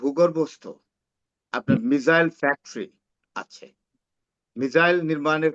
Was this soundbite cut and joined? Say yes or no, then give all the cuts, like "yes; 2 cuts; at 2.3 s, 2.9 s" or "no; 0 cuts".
no; 0 cuts